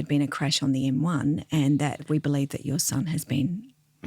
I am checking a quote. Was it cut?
yes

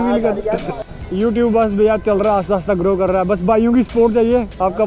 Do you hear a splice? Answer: yes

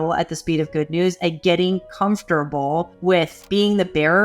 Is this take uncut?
no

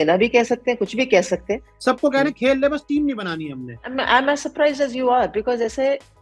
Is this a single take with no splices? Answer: no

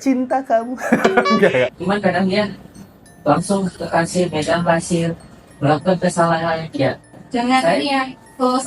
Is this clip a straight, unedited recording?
no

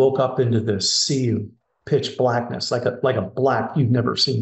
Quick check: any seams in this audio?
no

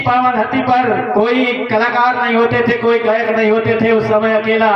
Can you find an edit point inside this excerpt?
yes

